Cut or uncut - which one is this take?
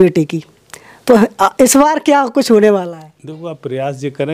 uncut